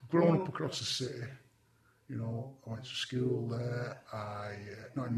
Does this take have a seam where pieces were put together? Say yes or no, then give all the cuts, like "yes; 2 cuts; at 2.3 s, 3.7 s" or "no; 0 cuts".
no; 0 cuts